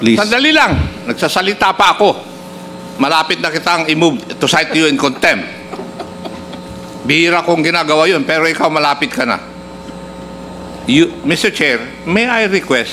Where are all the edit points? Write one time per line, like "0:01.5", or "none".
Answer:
none